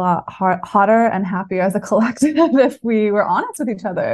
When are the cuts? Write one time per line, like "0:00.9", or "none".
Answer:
none